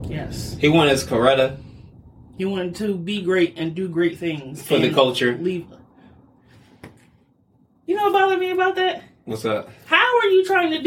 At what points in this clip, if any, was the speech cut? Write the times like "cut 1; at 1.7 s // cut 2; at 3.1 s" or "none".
none